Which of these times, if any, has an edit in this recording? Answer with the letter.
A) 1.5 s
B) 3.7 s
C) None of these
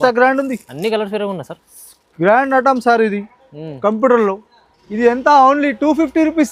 C